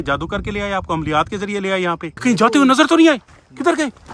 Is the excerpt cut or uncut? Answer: cut